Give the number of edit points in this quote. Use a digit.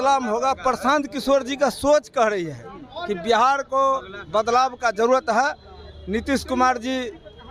0